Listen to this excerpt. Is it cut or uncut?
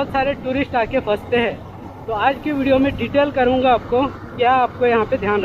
uncut